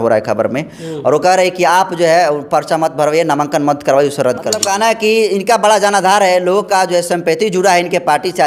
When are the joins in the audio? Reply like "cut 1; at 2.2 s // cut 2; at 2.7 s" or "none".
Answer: cut 1; at 4.6 s